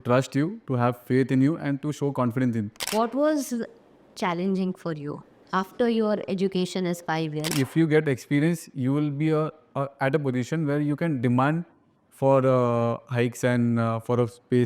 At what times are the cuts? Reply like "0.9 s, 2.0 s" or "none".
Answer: 2.8 s, 5.3 s, 7.5 s

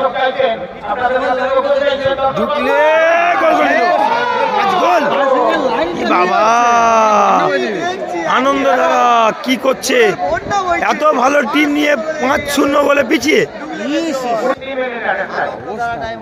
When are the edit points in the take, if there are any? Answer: none

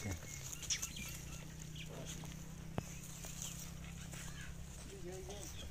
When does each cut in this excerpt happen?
none

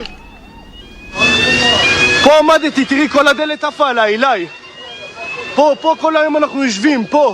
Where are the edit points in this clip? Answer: none

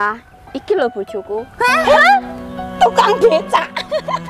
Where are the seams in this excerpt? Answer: 1.5 s

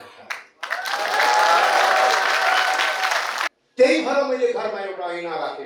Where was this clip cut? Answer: 3.4 s

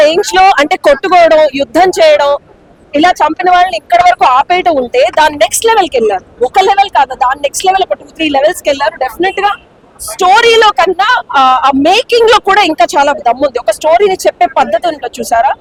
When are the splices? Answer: none

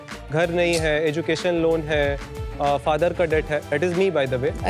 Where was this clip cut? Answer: none

